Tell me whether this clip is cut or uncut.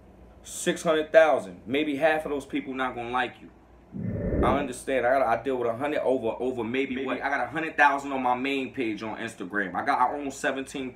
cut